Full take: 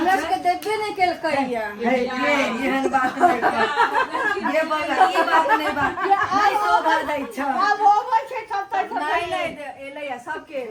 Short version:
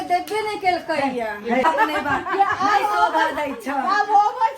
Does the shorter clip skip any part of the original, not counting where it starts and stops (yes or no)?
yes